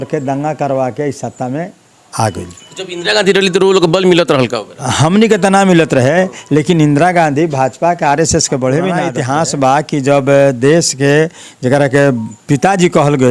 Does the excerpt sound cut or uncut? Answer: cut